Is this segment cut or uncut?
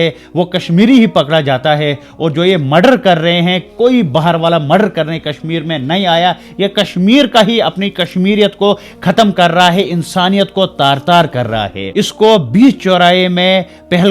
cut